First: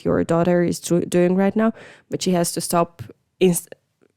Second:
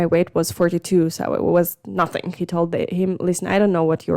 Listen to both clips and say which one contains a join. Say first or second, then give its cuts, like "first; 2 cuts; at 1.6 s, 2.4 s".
second; 1 cut; at 2.4 s